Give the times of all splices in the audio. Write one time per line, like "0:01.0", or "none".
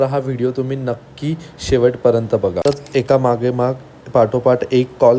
0:02.6